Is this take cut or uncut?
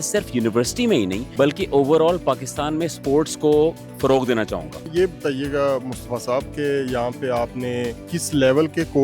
cut